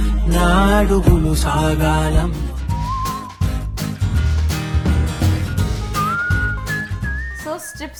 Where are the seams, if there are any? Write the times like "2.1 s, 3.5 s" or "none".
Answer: none